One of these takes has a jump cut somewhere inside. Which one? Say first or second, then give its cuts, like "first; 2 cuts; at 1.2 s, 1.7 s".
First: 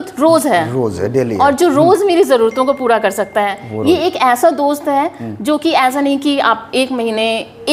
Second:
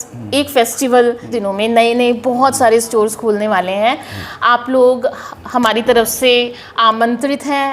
second; 1 cut; at 1.3 s